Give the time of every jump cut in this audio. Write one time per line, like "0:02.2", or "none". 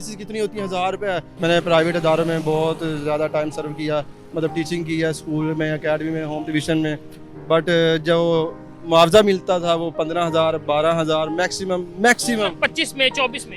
0:01.3